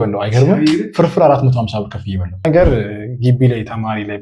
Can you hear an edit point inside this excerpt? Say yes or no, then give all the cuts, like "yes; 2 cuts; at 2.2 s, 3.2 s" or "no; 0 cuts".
yes; 1 cut; at 2.4 s